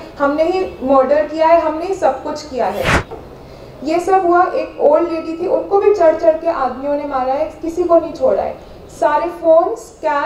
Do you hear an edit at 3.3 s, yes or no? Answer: yes